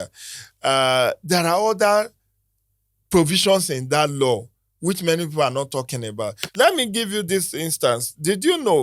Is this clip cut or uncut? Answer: cut